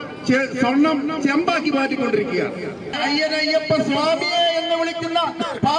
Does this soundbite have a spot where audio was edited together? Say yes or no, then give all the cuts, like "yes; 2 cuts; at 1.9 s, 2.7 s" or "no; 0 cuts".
yes; 1 cut; at 3.0 s